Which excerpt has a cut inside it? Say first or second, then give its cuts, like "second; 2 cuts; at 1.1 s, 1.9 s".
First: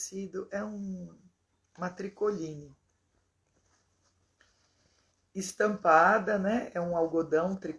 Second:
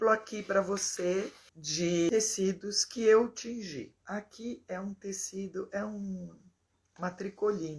second; 2 cuts; at 1.7 s, 3.9 s